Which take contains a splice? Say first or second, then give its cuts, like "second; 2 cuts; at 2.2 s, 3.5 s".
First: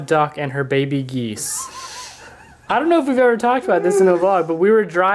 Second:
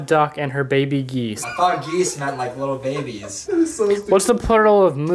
second; 2 cuts; at 1.4 s, 3.4 s